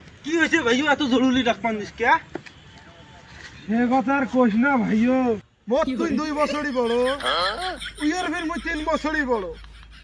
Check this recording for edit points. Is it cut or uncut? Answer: uncut